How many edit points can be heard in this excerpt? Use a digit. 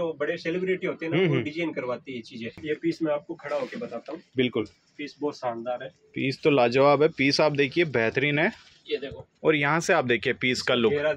1